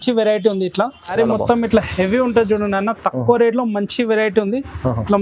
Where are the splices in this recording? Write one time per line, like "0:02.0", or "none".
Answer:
0:01.1